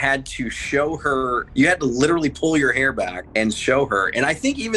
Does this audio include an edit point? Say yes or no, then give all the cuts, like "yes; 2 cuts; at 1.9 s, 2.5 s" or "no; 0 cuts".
yes; 2 cuts; at 1.4 s, 3.2 s